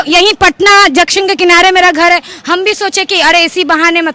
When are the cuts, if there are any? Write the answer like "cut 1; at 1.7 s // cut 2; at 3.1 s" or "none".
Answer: none